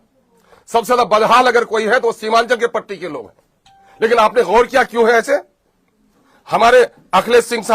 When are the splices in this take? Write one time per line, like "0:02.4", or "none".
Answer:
none